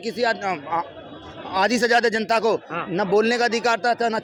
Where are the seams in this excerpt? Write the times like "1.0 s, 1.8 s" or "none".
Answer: none